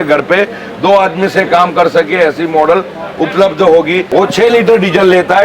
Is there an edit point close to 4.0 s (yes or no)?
yes